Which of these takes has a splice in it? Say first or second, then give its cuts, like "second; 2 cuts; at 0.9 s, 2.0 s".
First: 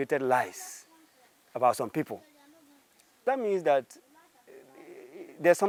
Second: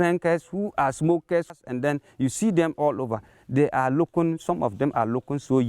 second; 1 cut; at 1.6 s